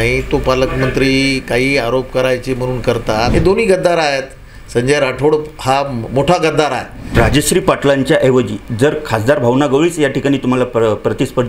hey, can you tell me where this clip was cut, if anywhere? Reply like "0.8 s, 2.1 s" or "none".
3.3 s, 7.0 s